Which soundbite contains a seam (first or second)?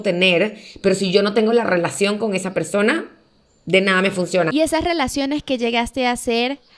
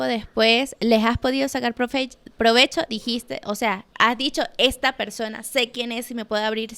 first